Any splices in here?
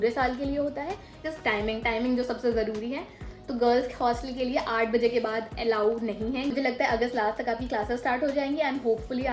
yes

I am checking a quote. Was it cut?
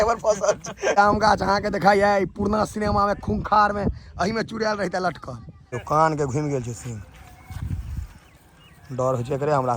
yes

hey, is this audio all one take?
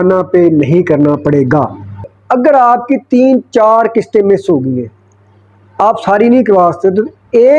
no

